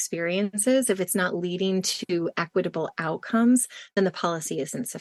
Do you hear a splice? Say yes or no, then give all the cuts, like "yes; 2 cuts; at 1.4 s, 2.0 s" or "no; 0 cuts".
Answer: no; 0 cuts